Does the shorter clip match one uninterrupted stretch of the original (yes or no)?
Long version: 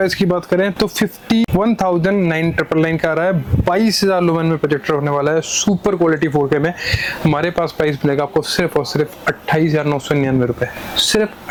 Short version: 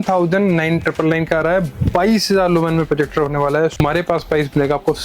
no